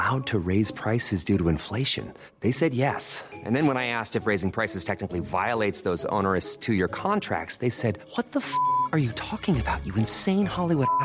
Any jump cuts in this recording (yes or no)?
no